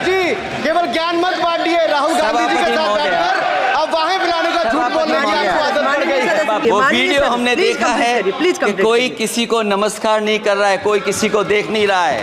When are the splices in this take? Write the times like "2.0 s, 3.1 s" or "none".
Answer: 6.6 s